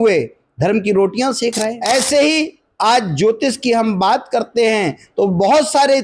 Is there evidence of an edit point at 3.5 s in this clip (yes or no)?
no